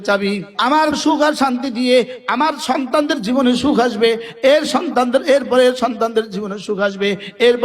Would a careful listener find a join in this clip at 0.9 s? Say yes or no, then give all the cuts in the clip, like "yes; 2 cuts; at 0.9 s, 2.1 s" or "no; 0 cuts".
yes; 1 cut; at 0.9 s